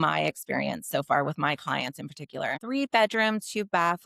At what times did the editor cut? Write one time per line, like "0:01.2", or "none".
0:02.6